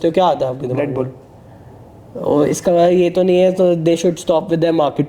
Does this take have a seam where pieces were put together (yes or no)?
no